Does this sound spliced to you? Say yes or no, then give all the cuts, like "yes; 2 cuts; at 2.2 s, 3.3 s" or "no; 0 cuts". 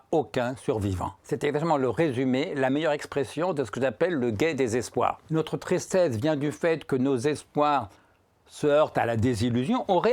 yes; 2 cuts; at 1.1 s, 5.2 s